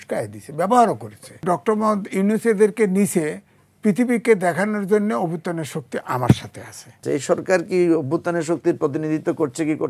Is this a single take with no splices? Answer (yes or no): no